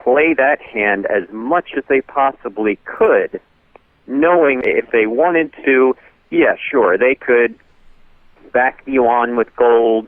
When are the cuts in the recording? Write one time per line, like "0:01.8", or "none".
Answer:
0:04.6